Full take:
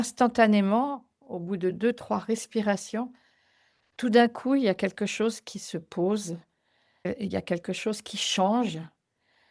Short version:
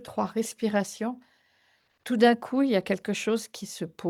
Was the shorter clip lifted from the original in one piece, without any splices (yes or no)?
yes